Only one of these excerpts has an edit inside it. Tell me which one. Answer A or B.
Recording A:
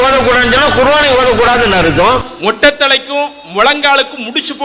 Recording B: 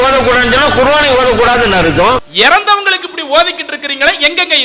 B